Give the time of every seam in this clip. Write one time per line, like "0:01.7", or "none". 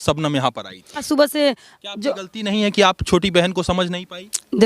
0:01.0